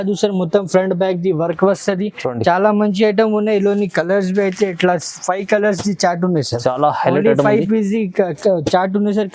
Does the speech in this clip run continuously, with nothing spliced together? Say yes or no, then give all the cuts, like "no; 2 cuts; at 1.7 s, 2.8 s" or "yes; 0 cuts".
yes; 0 cuts